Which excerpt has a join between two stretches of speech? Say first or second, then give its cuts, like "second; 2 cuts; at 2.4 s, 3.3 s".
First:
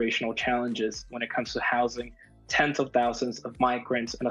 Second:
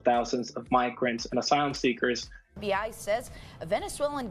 second; 1 cut; at 2.4 s